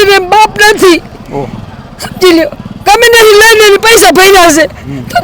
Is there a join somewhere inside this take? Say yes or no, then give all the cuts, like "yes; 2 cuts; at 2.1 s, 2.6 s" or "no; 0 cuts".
no; 0 cuts